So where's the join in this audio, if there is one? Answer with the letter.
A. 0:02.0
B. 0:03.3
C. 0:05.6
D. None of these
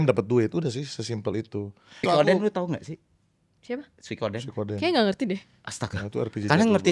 A